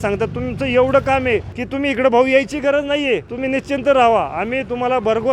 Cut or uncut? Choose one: cut